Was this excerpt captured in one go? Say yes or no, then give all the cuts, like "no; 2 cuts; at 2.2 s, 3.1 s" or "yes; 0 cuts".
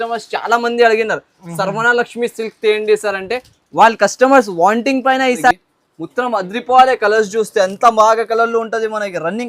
no; 1 cut; at 5.5 s